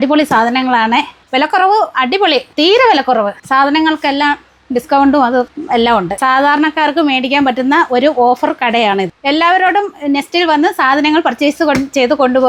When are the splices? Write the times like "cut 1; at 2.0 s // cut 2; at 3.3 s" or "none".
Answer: none

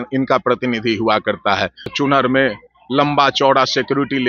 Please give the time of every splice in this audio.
cut 1; at 1.9 s

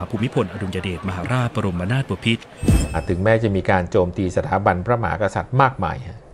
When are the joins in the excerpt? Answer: cut 1; at 3.0 s

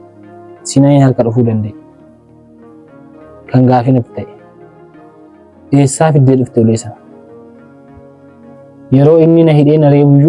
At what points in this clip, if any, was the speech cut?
cut 1; at 7.1 s // cut 2; at 8.9 s

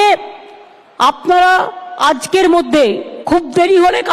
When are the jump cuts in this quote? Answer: cut 1; at 3.1 s

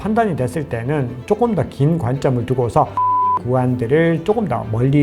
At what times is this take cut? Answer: cut 1; at 3.3 s

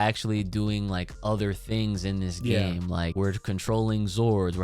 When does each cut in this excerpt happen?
cut 1; at 3.1 s

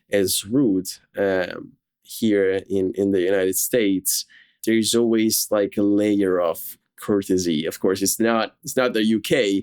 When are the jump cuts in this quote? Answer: cut 1; at 4.6 s

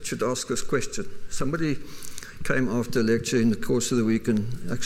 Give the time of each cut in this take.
cut 1; at 1.8 s

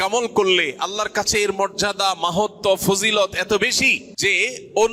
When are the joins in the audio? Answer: cut 1; at 4.0 s

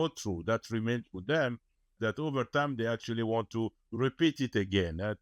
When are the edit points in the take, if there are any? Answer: cut 1; at 1.9 s

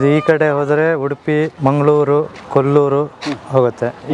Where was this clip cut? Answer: cut 1; at 1.5 s

